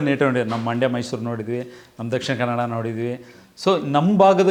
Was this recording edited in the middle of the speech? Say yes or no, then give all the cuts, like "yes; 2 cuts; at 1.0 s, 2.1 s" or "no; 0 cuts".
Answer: no; 0 cuts